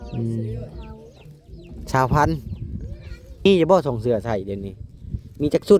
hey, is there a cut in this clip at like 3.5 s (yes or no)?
yes